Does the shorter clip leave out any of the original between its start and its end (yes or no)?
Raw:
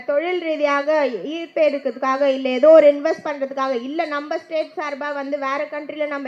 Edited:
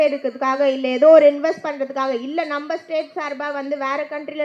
no